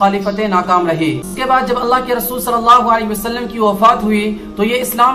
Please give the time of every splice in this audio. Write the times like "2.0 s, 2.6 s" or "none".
1.3 s